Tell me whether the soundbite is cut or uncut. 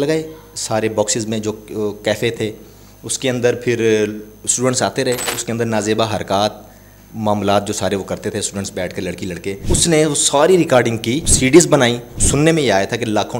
cut